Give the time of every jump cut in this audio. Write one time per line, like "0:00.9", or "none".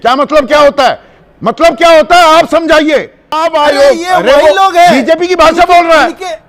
0:03.4